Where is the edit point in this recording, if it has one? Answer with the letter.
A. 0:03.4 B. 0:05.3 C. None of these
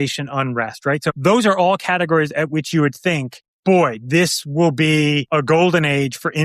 B